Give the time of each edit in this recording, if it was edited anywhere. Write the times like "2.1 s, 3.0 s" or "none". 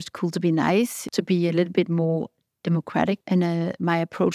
1.0 s, 3.2 s